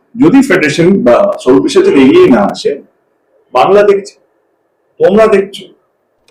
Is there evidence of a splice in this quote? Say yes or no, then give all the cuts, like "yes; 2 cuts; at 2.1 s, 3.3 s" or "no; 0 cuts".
no; 0 cuts